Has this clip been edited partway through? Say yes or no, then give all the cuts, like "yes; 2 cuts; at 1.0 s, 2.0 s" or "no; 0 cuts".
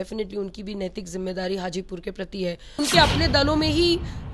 yes; 1 cut; at 2.8 s